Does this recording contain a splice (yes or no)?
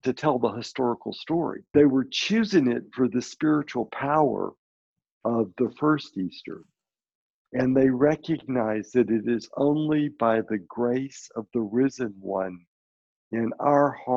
yes